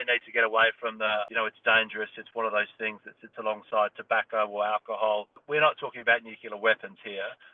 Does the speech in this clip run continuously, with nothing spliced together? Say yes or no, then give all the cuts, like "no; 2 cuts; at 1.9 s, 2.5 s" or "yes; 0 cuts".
no; 2 cuts; at 1.3 s, 5.3 s